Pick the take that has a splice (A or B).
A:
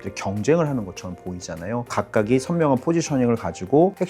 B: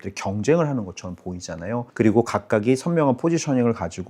A